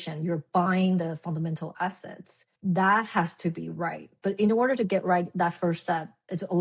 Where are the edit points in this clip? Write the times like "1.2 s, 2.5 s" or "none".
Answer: none